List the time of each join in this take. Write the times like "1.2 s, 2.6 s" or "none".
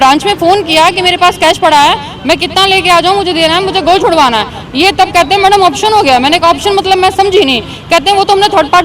none